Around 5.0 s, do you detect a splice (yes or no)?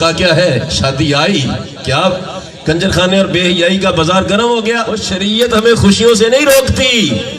yes